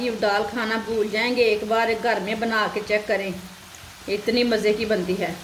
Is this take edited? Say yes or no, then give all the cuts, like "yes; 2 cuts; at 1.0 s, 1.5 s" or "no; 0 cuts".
no; 0 cuts